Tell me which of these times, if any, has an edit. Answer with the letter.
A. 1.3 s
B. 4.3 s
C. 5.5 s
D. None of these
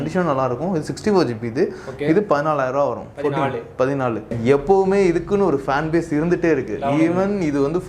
B